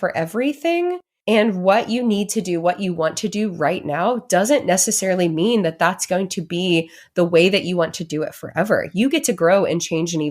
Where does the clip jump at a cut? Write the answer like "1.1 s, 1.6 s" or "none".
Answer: 1.1 s

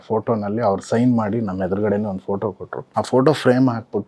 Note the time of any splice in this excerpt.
2.7 s

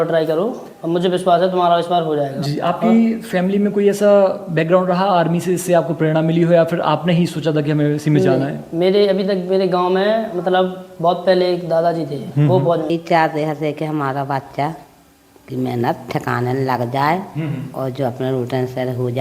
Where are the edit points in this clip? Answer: 12.9 s

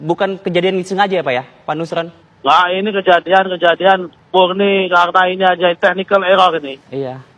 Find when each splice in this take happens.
2.2 s, 4.1 s

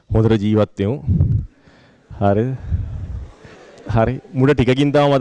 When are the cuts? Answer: none

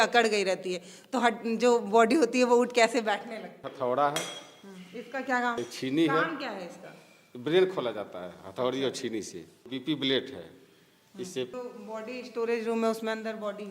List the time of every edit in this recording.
3.6 s, 5.6 s, 9.7 s, 11.5 s

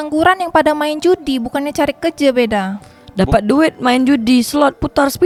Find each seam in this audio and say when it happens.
none

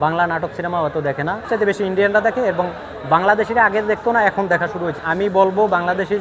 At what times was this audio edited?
1.4 s, 5.0 s

